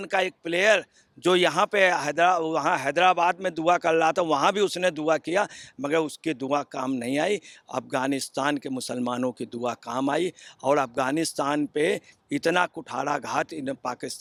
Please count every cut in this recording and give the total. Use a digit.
0